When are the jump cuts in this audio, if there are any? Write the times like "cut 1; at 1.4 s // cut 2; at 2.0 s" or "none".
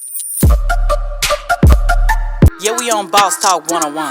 none